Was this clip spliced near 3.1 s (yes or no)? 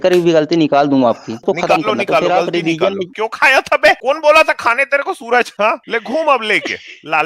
yes